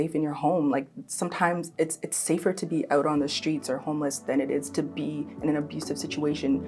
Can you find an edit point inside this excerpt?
no; 0 cuts

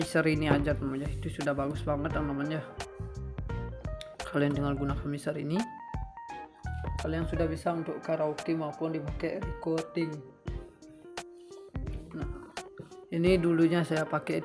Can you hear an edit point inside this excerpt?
no; 0 cuts

